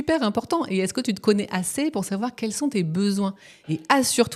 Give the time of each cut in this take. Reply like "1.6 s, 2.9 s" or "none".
none